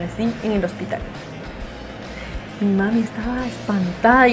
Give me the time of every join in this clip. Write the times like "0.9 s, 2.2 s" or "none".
none